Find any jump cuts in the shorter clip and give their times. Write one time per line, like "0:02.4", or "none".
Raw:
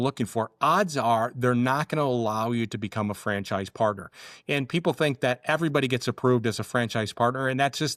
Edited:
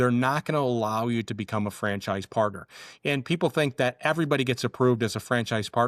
none